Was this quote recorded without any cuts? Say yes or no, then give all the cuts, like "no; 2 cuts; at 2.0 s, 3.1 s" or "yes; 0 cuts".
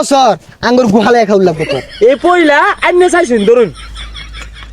no; 1 cut; at 1.8 s